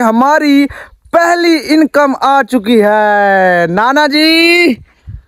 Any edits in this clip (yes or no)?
no